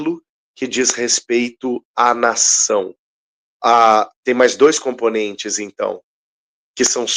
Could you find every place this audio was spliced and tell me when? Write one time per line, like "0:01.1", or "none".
none